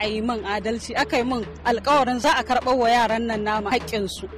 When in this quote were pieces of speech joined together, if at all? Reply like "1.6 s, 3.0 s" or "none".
2.2 s, 3.7 s